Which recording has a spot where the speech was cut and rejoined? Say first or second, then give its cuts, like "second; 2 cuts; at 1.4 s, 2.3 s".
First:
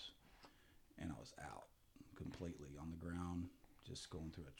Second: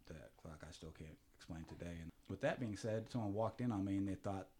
second; 1 cut; at 2.2 s